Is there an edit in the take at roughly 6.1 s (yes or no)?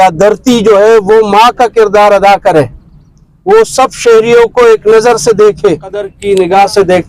yes